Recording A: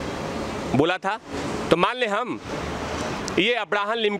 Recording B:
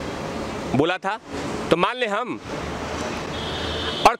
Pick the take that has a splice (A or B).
A